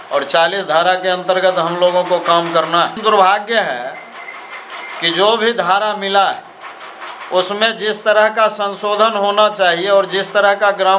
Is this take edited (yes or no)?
yes